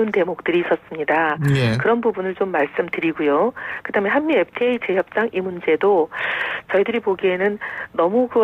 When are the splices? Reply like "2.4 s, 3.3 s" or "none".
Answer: none